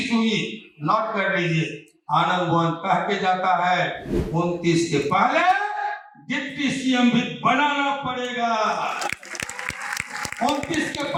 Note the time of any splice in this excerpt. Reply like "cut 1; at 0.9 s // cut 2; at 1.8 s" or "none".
none

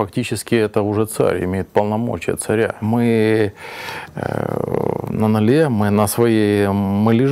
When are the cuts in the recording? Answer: cut 1; at 2.8 s

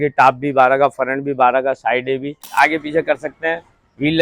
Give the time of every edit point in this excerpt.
cut 1; at 2.5 s

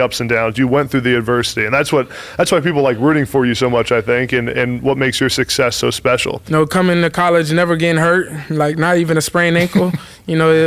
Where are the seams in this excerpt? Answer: cut 1; at 6.4 s

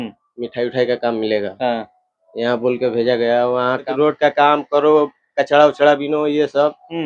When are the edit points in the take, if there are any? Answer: cut 1; at 3.9 s

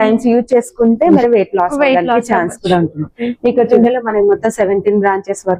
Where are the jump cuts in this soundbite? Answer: cut 1; at 1.2 s // cut 2; at 3.7 s

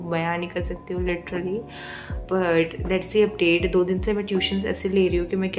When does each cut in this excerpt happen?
none

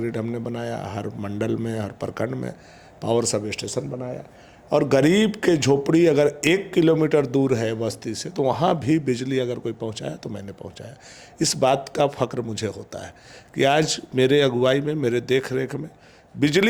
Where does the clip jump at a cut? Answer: none

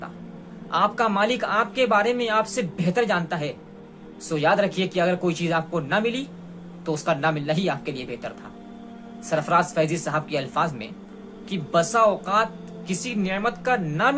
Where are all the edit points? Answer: none

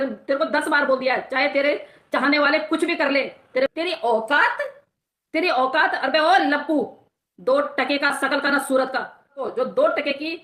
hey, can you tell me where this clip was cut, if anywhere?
cut 1; at 3.7 s // cut 2; at 9.4 s

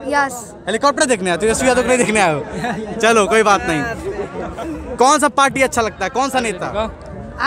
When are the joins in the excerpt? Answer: none

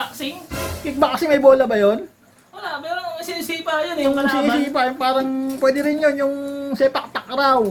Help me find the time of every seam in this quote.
none

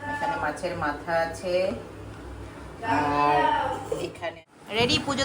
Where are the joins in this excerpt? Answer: cut 1; at 4.2 s

